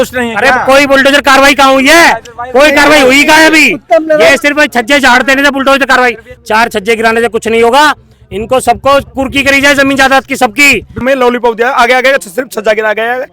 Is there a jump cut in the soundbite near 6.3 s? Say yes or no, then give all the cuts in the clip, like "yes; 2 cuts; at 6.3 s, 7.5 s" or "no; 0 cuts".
yes; 2 cuts; at 6.3 s, 11.0 s